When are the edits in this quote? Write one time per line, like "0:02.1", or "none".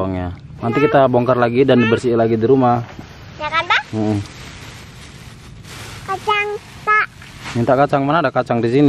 none